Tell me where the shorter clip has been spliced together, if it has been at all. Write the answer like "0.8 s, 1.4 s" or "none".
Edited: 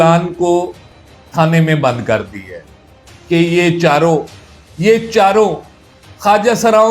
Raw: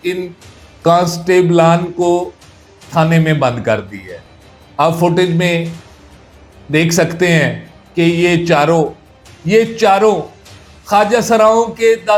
3.0 s